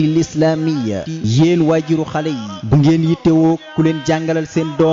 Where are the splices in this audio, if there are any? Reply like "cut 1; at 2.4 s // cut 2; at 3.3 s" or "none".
cut 1; at 1.0 s